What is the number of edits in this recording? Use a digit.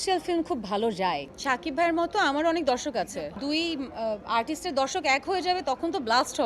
2